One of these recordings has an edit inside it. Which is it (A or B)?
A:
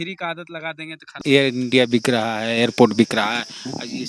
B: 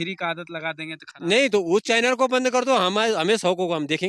A